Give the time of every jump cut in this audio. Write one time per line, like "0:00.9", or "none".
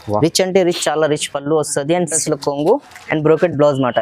0:02.2